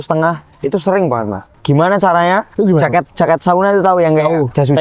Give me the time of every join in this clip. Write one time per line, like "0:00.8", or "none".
0:01.5
0:02.5